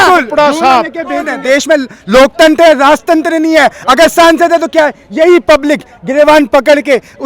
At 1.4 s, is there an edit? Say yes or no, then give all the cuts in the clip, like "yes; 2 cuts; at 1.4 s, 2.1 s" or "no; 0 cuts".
yes; 1 cut; at 1.4 s